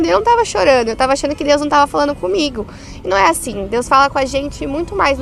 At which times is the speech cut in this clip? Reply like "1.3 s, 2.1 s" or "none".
none